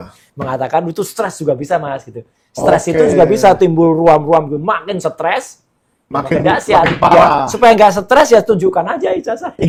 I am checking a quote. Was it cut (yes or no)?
no